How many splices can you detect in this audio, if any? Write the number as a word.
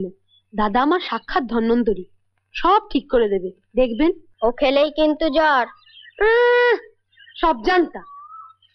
one